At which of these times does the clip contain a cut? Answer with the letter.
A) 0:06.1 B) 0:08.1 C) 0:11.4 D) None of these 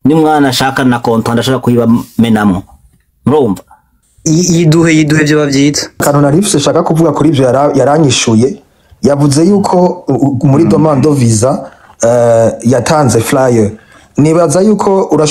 A